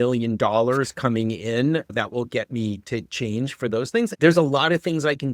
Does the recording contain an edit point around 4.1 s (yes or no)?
yes